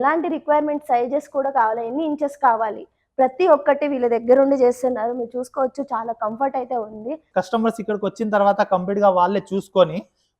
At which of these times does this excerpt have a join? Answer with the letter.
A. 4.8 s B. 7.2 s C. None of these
B